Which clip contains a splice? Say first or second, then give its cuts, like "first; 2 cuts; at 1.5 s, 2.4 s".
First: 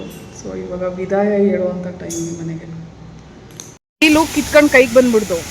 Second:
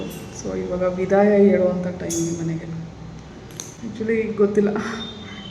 first; 1 cut; at 3.6 s